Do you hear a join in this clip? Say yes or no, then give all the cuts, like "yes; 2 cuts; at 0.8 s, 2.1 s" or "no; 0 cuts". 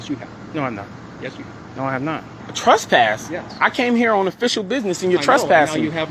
yes; 1 cut; at 2.4 s